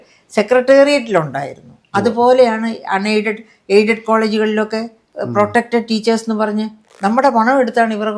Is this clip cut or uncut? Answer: cut